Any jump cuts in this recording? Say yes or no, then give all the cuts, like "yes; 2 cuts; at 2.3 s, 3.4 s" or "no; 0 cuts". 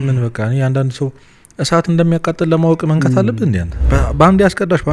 yes; 1 cut; at 3.8 s